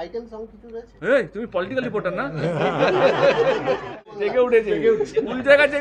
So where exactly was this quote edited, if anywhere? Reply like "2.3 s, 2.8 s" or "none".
4.1 s